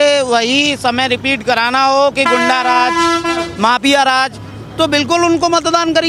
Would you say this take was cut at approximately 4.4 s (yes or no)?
no